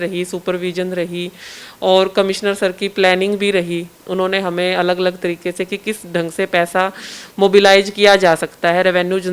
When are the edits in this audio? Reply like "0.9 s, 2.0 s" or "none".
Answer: none